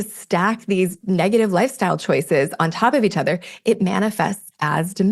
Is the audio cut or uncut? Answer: cut